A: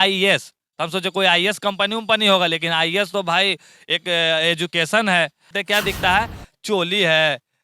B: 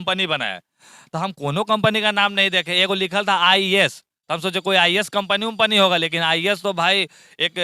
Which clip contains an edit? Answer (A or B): A